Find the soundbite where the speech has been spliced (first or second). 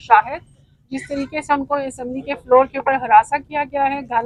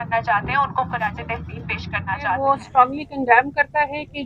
second